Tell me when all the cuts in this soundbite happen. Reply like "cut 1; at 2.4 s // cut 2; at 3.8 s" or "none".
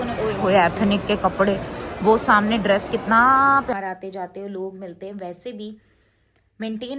cut 1; at 3.7 s